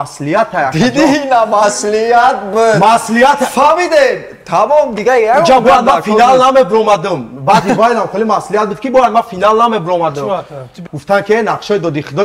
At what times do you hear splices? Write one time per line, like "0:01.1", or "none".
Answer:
0:10.8